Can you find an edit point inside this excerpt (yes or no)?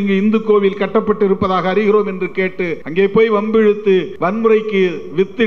yes